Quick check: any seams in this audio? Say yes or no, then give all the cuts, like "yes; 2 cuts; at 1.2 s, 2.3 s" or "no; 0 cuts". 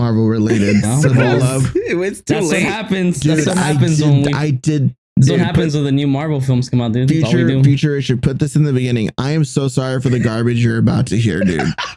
yes; 1 cut; at 4.9 s